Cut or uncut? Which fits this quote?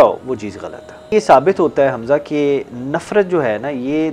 cut